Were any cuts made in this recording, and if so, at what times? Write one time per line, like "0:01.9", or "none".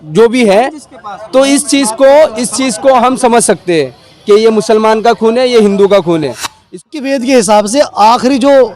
0:06.9